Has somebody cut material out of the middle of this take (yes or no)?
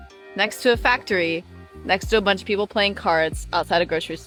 no